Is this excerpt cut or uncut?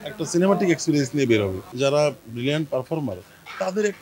cut